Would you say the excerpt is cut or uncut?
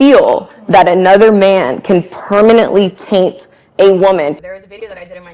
cut